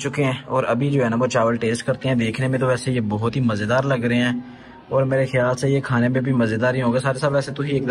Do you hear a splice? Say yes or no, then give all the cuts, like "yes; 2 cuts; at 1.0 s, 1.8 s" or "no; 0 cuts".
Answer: no; 0 cuts